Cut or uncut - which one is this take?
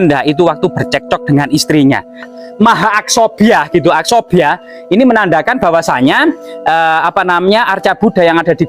cut